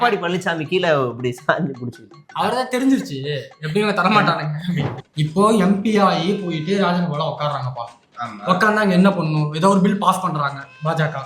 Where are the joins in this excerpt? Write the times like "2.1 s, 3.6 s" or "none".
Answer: 4.9 s

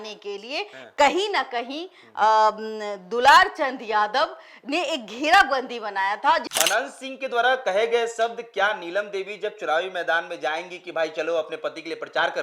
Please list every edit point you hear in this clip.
6.5 s

